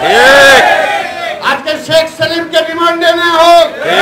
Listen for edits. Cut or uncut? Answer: uncut